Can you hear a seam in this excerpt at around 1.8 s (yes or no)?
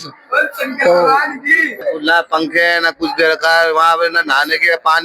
yes